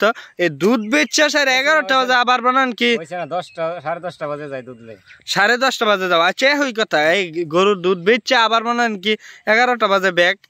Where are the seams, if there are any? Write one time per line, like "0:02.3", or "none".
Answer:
none